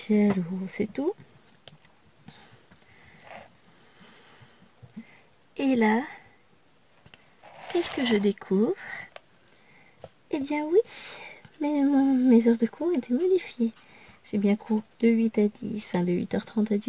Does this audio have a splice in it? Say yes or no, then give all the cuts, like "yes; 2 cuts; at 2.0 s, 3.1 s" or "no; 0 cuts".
no; 0 cuts